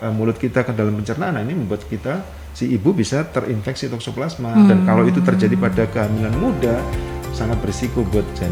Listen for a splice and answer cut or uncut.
uncut